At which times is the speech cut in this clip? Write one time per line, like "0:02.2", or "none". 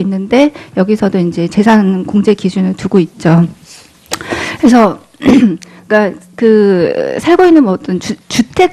0:06.3